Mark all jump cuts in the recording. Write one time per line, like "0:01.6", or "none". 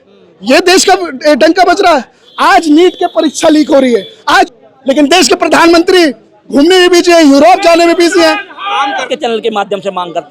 0:04.5
0:09.1

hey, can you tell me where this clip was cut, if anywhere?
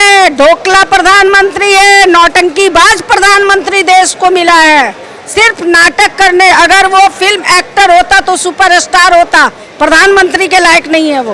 none

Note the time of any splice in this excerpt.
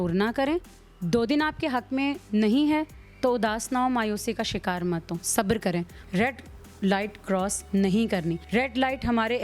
0:06.0
0:08.4

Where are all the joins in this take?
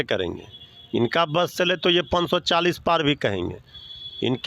none

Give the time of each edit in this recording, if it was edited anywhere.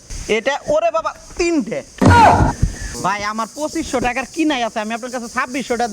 0:02.8

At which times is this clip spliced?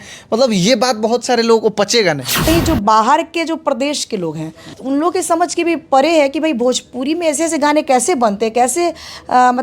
0:02.4
0:04.7

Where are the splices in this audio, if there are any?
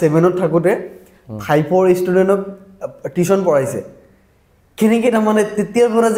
none

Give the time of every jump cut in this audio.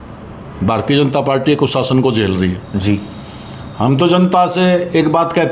none

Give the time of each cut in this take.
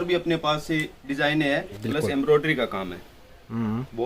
0:01.7

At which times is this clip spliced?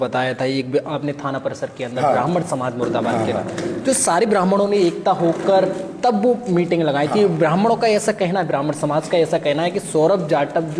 none

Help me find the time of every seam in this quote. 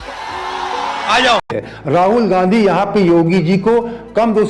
0:01.5

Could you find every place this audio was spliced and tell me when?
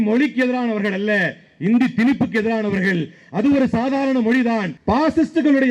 0:04.7

